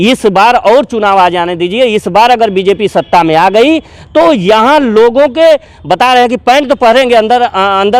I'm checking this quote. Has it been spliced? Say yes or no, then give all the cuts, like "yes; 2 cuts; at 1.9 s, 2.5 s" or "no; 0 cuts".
no; 0 cuts